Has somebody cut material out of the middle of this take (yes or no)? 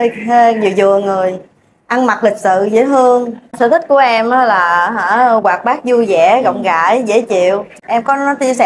yes